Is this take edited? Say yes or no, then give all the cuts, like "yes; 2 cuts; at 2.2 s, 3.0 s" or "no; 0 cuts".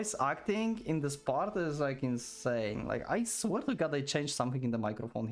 no; 0 cuts